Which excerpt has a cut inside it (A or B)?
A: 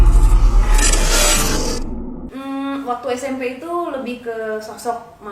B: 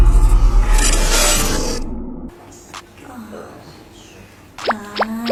A